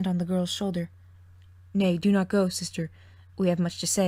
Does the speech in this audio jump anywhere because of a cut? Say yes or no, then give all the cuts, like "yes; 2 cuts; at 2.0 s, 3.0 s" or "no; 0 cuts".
no; 0 cuts